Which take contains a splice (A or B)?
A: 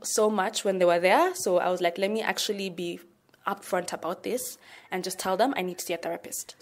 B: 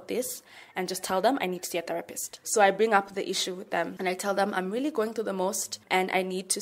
B